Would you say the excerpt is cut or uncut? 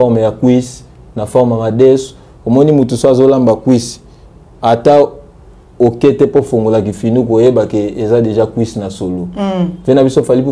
uncut